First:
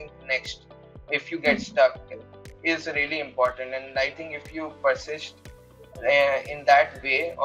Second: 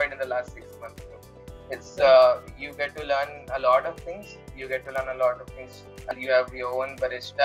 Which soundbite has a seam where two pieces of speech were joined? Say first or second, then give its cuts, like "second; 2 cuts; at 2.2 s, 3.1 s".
second; 1 cut; at 6.1 s